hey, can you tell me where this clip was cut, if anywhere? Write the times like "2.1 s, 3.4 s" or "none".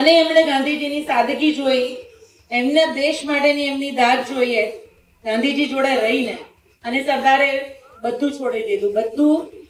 none